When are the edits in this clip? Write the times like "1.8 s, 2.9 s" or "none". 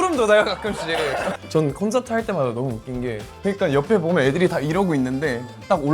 1.1 s, 3.3 s